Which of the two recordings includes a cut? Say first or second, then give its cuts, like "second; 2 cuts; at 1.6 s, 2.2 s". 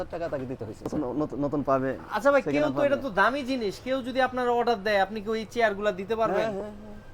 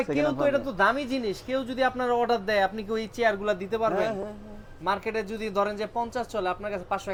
first; 1 cut; at 0.9 s